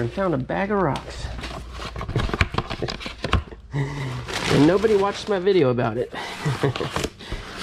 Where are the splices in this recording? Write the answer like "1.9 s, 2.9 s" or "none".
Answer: none